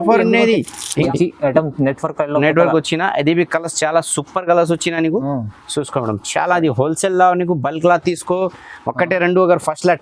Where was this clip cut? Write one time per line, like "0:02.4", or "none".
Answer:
0:01.0